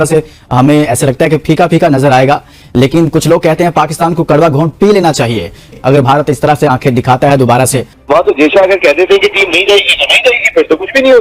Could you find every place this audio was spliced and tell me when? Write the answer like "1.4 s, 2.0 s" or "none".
5.7 s, 7.9 s